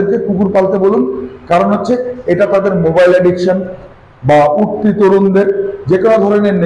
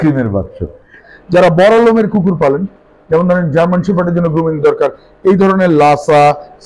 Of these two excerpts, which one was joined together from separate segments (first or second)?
second